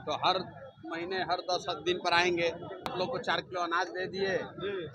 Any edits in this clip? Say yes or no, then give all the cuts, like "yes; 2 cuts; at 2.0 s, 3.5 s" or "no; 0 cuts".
yes; 1 cut; at 2.9 s